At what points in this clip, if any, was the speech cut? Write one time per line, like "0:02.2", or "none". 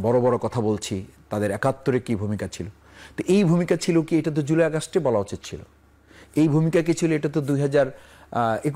none

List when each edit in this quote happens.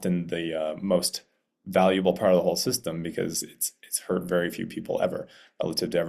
none

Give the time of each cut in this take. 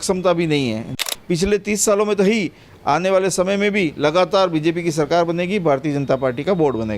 0:01.1

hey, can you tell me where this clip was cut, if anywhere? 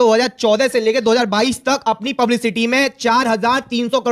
none

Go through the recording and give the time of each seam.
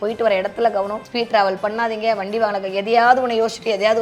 0:01.0

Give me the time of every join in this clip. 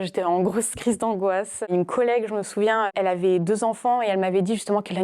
0:01.6
0:02.9

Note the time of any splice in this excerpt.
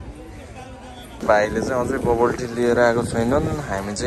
0:01.1

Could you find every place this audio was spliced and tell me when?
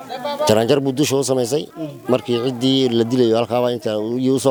none

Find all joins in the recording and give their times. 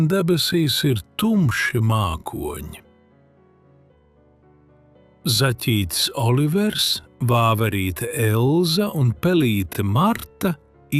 none

